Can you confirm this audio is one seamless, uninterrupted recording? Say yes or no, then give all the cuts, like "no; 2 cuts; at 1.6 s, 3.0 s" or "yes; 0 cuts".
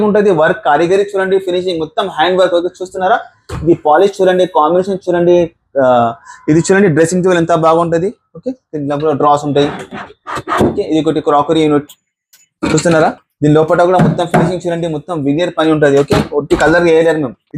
yes; 0 cuts